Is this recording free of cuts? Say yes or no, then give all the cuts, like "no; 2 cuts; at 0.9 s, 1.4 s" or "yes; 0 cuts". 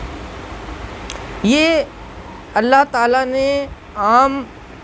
yes; 0 cuts